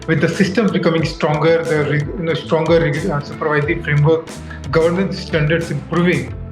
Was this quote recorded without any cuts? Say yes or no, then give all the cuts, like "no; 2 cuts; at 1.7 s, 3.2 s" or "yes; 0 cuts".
yes; 0 cuts